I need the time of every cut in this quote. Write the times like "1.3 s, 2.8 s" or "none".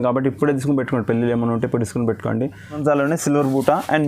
2.8 s